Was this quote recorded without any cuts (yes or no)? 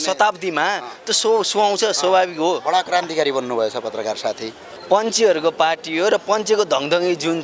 no